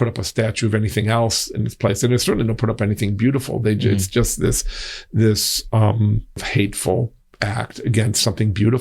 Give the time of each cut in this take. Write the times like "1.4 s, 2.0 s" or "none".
6.5 s, 7.2 s